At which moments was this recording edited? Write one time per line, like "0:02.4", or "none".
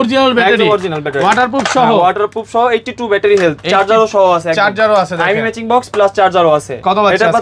none